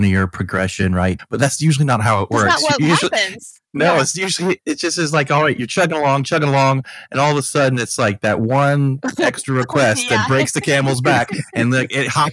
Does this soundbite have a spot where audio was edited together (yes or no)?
yes